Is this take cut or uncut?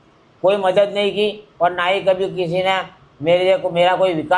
uncut